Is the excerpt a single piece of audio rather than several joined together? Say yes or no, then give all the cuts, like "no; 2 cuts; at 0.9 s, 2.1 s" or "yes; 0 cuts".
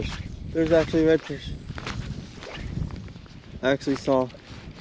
yes; 0 cuts